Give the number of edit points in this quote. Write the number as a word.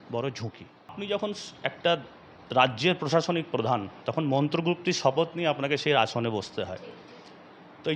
one